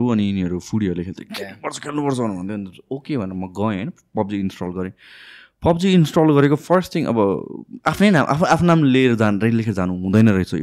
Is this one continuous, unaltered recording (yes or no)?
yes